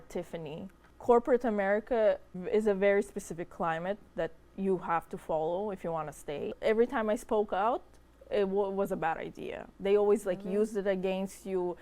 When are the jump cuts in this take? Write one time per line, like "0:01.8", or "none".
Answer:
0:00.9
0:02.3
0:06.5